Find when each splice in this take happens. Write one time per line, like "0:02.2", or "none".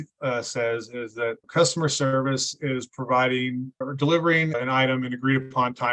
0:01.4
0:03.8
0:04.5